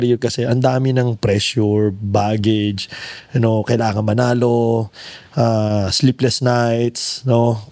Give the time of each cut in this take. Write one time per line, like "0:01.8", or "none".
none